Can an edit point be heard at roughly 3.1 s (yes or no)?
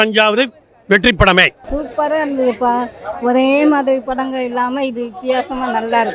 no